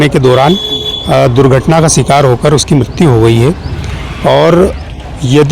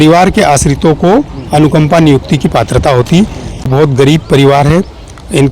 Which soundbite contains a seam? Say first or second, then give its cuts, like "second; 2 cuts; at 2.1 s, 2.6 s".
second; 1 cut; at 3.7 s